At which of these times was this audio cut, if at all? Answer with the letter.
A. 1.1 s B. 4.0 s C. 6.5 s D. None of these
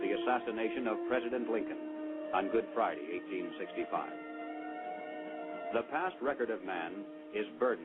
B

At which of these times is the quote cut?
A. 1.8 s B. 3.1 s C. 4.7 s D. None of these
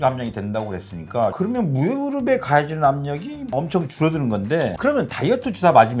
C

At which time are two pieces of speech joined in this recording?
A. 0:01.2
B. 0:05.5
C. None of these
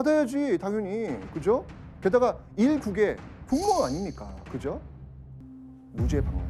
B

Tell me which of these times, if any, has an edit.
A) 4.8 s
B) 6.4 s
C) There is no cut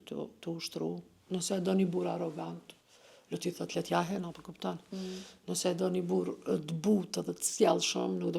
C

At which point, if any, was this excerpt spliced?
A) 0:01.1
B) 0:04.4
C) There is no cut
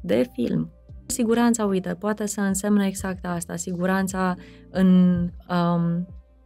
A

